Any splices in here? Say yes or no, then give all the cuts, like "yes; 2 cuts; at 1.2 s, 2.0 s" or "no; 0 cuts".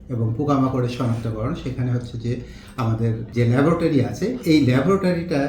yes; 1 cut; at 3.2 s